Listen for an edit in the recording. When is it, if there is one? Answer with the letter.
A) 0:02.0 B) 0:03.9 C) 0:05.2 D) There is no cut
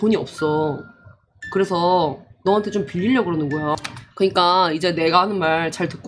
B